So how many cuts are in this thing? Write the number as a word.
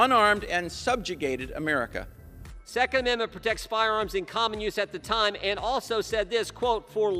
one